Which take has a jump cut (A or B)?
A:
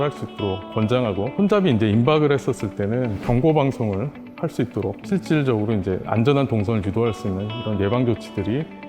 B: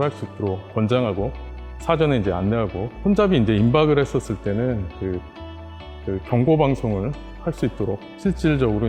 A